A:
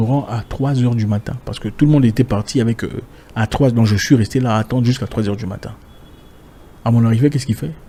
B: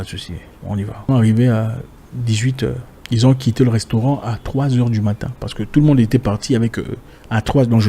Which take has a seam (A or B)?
B